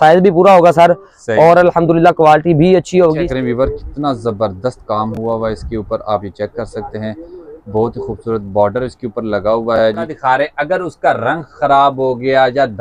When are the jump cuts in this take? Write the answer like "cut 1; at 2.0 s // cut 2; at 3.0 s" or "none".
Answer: cut 1; at 3.2 s // cut 2; at 10.1 s